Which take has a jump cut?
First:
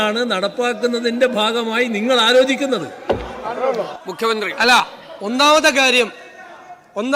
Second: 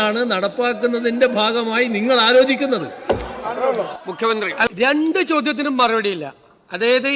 second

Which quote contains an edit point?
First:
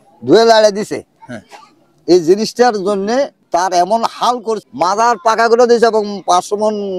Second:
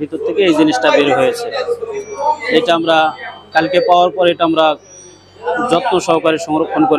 first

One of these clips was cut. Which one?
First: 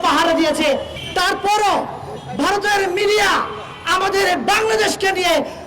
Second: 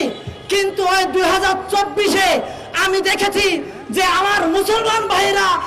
first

